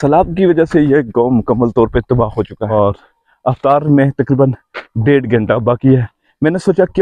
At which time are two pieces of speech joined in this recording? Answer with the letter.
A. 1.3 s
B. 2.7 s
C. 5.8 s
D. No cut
B